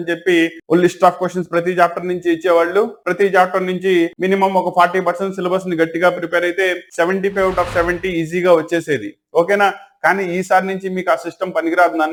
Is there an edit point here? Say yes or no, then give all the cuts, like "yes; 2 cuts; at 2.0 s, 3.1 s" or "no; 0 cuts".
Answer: no; 0 cuts